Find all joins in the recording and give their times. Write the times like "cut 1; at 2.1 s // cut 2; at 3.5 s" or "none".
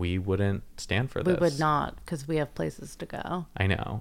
none